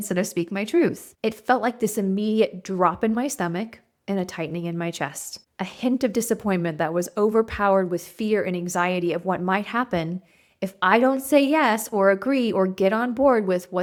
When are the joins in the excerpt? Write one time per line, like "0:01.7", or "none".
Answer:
none